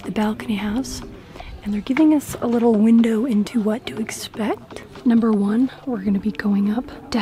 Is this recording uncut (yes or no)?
yes